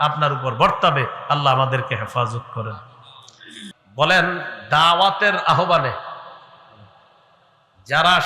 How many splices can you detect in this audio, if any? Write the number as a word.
one